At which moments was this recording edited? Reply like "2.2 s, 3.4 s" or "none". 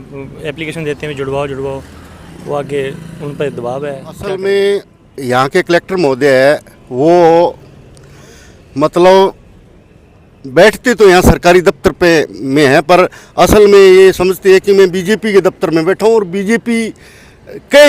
4.3 s